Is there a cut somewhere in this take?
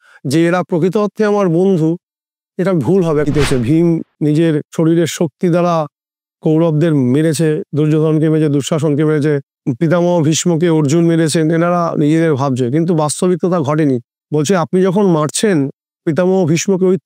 yes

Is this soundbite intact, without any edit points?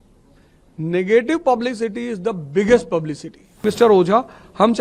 no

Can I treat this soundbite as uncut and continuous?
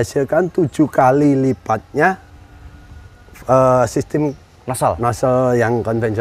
yes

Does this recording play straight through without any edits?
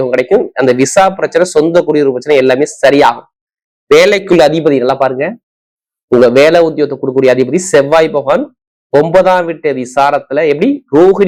yes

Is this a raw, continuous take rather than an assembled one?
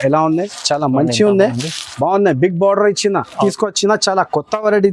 no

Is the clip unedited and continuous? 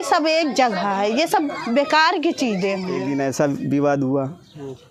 no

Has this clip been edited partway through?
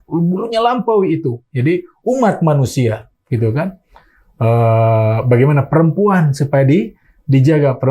no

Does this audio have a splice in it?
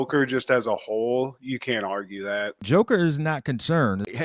yes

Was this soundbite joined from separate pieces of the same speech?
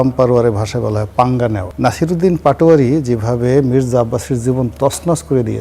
yes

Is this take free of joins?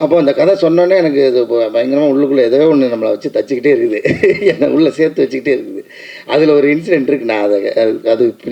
yes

